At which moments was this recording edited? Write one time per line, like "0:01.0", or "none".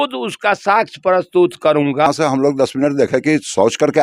0:02.1